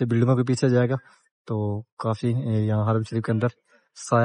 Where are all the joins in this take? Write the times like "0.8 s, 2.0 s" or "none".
none